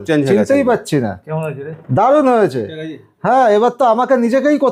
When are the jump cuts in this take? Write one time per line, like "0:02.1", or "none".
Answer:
none